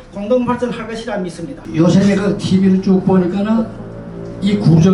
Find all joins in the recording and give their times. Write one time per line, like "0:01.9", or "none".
0:01.6